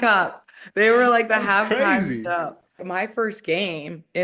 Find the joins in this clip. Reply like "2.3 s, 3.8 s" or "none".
2.8 s